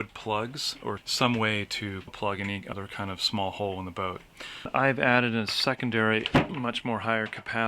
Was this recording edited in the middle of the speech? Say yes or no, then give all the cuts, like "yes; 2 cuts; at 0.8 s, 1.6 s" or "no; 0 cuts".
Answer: yes; 3 cuts; at 1.0 s, 2.3 s, 4.7 s